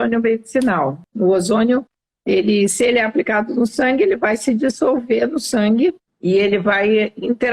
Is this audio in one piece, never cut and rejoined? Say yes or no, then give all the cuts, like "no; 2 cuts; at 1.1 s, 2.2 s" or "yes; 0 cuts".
no; 2 cuts; at 1.0 s, 6.1 s